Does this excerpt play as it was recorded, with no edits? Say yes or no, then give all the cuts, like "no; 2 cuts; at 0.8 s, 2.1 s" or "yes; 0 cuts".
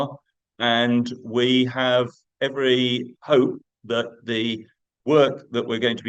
yes; 0 cuts